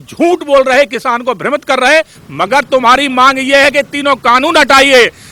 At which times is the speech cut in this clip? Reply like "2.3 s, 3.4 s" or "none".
2.2 s